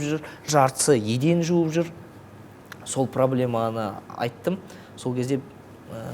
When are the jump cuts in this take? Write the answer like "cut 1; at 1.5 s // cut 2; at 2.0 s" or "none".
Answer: none